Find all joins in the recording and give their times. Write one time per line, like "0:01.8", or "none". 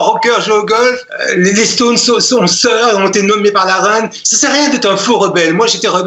0:01.1
0:04.2